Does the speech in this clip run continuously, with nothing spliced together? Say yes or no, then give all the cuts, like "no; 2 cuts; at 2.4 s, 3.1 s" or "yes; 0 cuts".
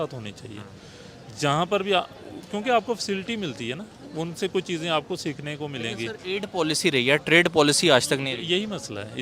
yes; 0 cuts